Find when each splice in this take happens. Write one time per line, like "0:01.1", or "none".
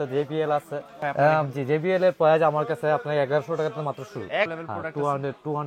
0:01.0
0:04.5